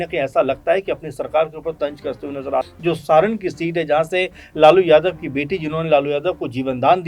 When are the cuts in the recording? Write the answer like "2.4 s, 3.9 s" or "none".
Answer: 2.7 s